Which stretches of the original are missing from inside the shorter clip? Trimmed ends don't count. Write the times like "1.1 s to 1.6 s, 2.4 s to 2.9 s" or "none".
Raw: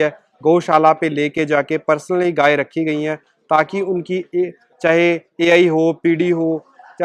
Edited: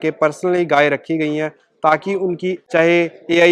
4.1 s to 4.6 s